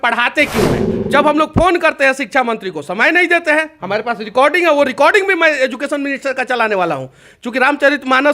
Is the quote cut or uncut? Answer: cut